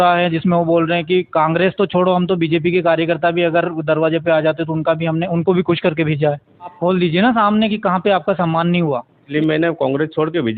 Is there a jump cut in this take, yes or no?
yes